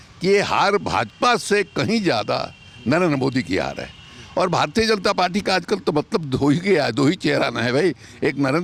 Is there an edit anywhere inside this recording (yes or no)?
no